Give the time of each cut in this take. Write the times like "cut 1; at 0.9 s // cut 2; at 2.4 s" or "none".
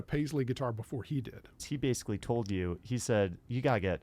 cut 1; at 1.6 s